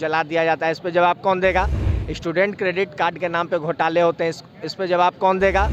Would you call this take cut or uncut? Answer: uncut